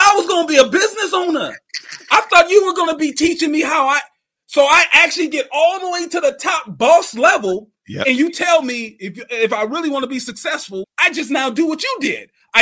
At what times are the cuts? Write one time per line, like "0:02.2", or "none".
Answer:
0:10.9